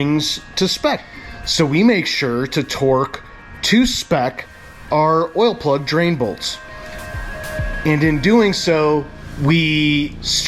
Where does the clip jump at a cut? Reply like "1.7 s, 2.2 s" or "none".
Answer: 1.2 s